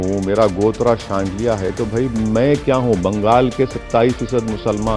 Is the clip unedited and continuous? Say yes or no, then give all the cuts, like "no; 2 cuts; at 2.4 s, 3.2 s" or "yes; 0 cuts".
yes; 0 cuts